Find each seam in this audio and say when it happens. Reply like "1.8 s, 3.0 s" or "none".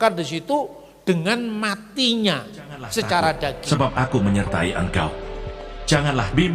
3.6 s